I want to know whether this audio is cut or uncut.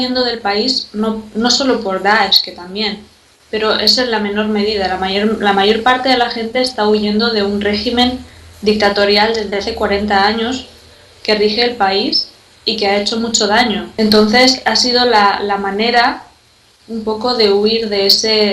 cut